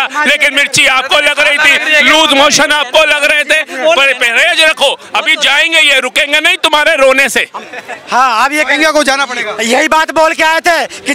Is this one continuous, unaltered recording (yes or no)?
yes